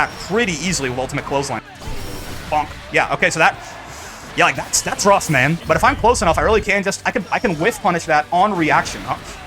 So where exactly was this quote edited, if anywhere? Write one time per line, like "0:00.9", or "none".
0:01.6
0:05.6